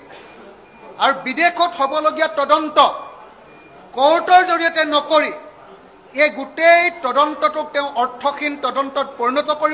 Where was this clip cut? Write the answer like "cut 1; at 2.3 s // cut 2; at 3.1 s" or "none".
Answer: none